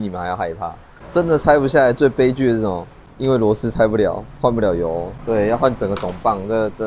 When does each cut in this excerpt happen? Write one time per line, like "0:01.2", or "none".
0:00.9
0:03.1
0:05.1